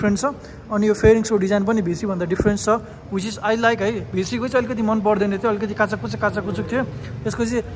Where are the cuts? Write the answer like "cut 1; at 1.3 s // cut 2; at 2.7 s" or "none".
none